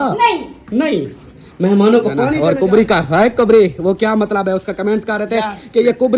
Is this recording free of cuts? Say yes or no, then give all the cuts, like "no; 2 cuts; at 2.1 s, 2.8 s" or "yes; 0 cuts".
no; 1 cut; at 2.3 s